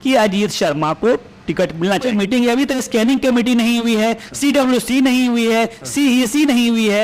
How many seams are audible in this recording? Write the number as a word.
one